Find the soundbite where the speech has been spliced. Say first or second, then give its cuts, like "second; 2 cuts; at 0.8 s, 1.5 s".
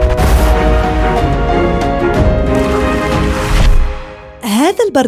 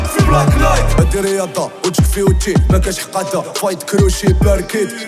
second; 1 cut; at 1.0 s